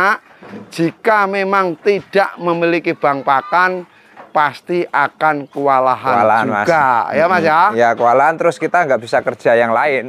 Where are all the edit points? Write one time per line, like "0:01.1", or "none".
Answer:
none